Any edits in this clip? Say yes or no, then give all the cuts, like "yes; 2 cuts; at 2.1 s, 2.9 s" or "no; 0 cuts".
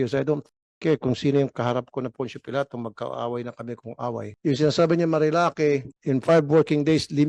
yes; 2 cuts; at 4.3 s, 5.9 s